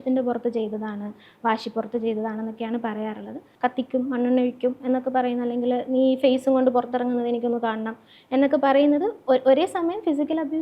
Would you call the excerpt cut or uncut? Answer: cut